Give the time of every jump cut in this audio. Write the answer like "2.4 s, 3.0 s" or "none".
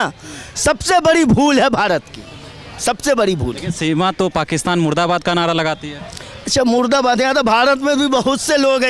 none